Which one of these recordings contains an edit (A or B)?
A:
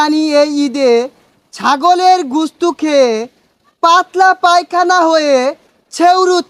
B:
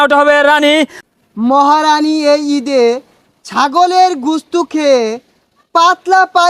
B